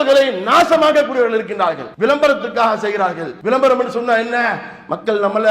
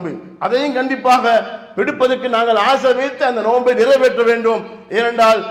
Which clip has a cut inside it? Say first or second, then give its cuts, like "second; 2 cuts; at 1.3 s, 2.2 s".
first; 2 cuts; at 1.8 s, 3.3 s